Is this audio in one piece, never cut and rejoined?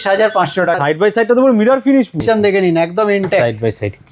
no; 2 cuts; at 0.8 s, 2.2 s

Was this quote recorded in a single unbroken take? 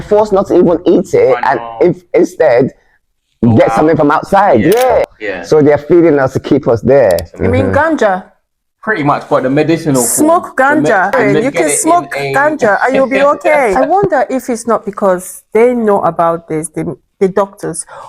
no; 4 cuts; at 5.0 s, 7.3 s, 11.1 s, 13.7 s

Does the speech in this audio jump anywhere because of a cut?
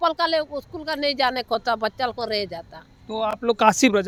no; 0 cuts

